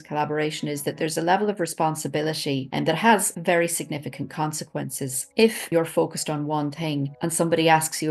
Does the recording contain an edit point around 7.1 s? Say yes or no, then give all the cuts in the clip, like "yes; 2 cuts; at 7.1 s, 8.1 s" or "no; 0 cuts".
yes; 3 cuts; at 2.7 s, 5.6 s, 7.1 s